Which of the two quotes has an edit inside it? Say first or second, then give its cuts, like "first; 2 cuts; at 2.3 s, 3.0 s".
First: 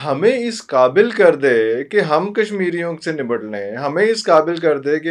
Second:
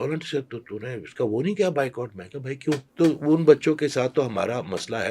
second; 1 cut; at 2.9 s